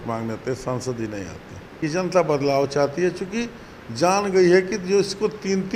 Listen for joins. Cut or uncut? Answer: cut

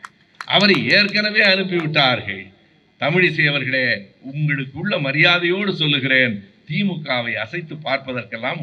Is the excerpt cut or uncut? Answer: uncut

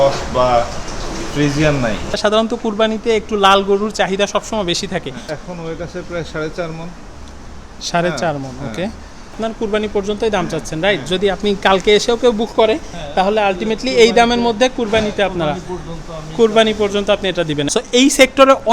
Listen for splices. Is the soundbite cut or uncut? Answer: cut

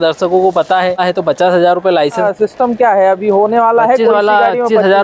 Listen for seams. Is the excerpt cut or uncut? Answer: cut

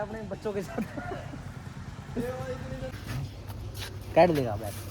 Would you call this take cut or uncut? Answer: cut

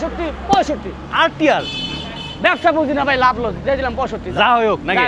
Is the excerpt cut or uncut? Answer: uncut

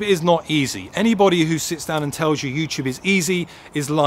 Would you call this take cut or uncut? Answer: uncut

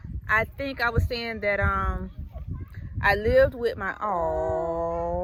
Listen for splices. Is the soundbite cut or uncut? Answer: uncut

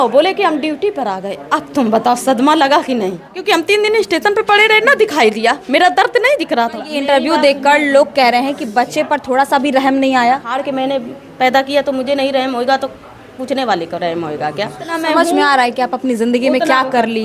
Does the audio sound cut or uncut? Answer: cut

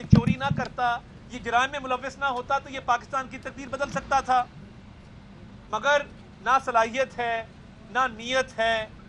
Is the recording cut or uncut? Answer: uncut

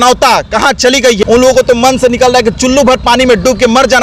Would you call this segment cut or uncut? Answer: cut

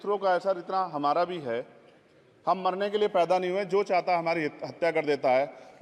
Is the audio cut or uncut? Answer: uncut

